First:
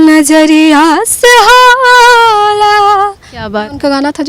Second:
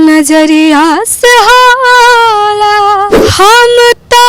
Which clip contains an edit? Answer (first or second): second